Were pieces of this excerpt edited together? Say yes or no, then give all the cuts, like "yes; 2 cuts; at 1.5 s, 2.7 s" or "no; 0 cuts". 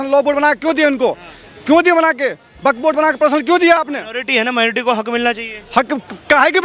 no; 0 cuts